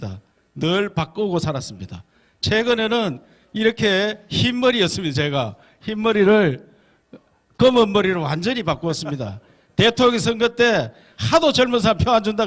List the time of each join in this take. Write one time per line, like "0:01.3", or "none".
0:07.9